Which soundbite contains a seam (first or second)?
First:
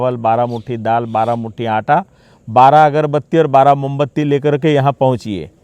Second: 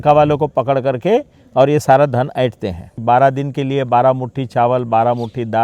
second